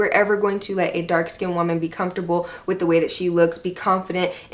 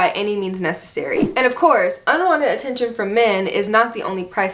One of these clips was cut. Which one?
second; 1 cut; at 1.2 s

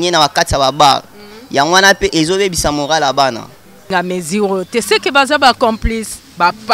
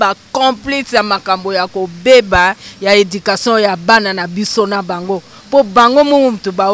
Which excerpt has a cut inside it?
first; 1 cut; at 3.9 s

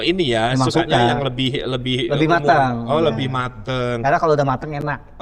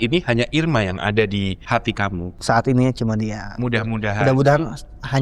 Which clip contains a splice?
second; 1 cut; at 1.9 s

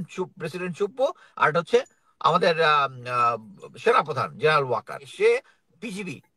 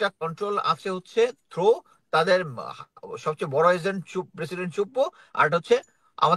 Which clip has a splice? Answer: first; 1 cut; at 5.1 s

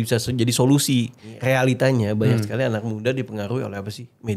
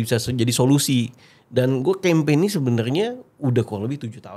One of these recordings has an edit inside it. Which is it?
first; 1 cut; at 1.3 s

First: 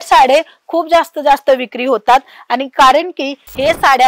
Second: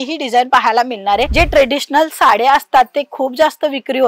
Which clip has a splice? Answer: second; 1 cut; at 1.3 s

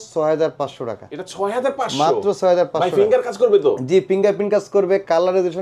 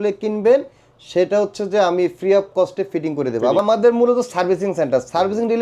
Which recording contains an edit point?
second; 1 cut; at 3.6 s

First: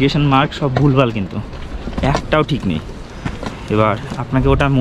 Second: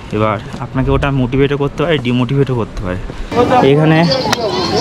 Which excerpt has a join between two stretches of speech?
second; 1 cut; at 3.3 s

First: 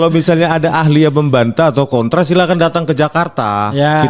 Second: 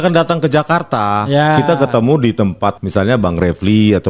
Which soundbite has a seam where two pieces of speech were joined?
second; 1 cut; at 2.8 s

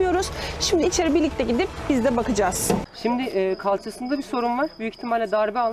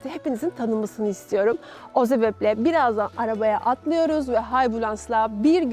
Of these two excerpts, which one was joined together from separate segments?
first; 1 cut; at 2.9 s

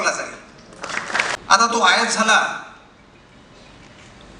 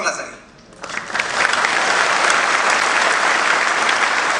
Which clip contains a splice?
first; 1 cut; at 1.4 s

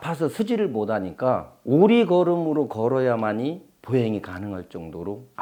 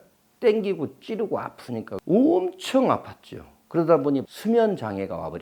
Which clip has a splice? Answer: second; 2 cuts; at 1.9 s, 4.3 s

